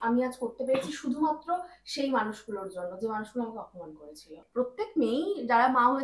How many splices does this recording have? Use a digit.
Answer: 1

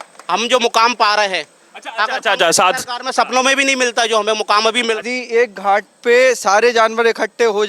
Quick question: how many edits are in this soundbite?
1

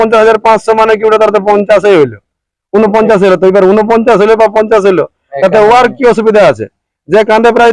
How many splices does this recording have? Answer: 0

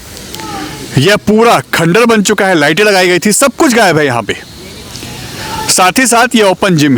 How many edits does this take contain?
0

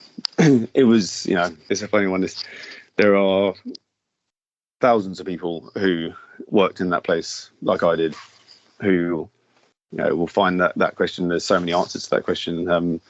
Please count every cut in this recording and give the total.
1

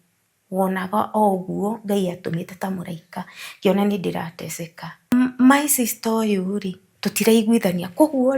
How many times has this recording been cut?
1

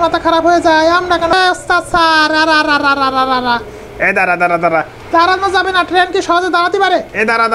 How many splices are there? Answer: 1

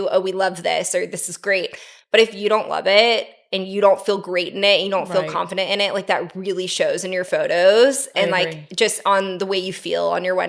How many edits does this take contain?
0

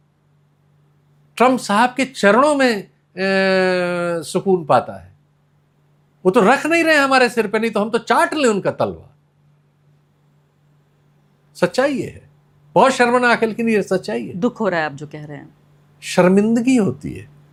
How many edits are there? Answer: 0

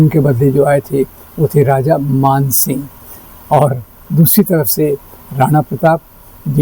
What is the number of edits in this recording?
0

